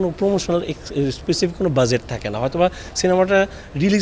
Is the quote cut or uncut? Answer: uncut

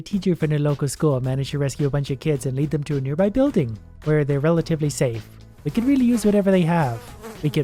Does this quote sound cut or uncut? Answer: uncut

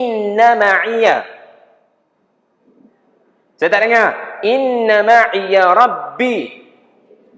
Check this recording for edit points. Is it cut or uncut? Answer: uncut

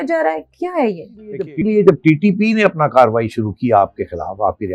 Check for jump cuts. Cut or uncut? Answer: cut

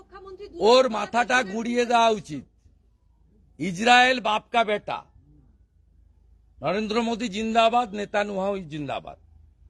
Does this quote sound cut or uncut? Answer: uncut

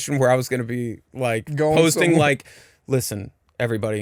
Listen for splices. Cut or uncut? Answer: uncut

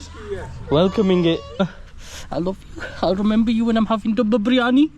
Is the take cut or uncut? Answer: cut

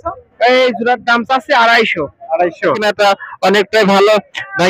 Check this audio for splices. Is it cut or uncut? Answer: cut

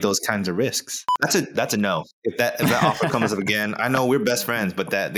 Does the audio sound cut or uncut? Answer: cut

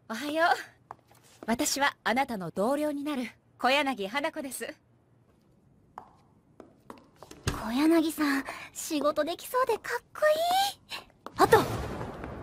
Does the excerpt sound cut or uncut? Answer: uncut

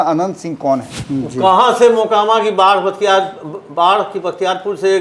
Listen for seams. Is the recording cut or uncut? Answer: cut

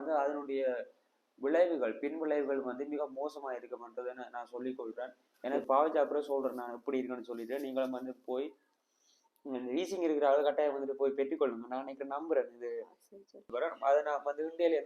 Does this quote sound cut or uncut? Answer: cut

